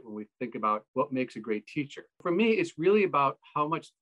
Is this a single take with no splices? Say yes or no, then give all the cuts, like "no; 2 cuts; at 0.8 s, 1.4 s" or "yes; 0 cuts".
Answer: no; 2 cuts; at 0.9 s, 2.2 s